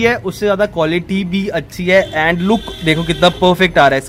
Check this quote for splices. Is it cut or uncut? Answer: uncut